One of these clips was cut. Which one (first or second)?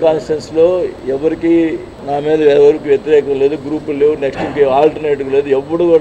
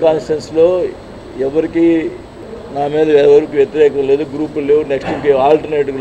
first